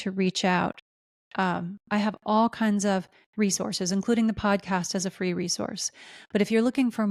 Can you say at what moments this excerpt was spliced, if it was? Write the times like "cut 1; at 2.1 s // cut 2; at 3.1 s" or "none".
none